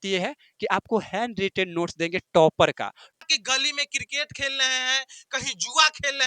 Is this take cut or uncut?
cut